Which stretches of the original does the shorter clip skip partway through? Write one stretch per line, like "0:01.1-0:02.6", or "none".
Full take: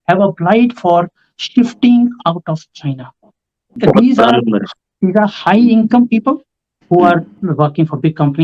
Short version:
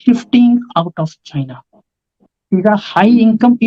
0:03.7-0:04.7